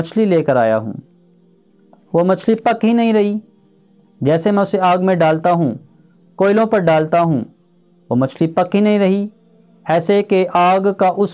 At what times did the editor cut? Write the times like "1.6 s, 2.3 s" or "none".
none